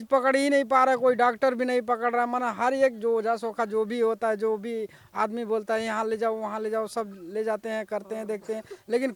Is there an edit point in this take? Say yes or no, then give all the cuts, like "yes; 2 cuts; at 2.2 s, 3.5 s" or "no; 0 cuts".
no; 0 cuts